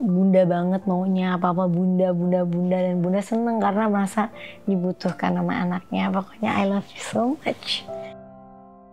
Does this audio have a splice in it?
no; 0 cuts

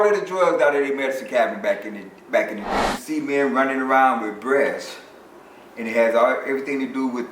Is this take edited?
yes; 1 cut; at 2.9 s

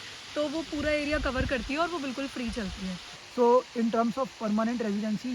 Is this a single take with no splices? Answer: no; 1 cut; at 3.1 s

